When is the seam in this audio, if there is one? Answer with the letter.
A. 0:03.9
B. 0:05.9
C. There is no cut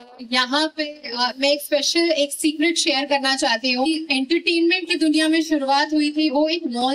A